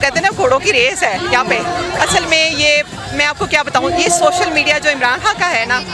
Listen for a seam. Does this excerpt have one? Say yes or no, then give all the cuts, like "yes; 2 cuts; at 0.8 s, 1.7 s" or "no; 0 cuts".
no; 0 cuts